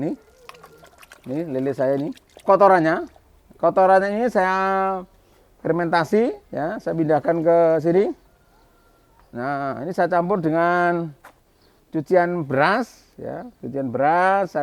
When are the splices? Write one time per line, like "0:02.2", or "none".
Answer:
0:02.3